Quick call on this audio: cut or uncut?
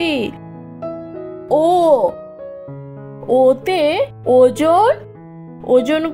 uncut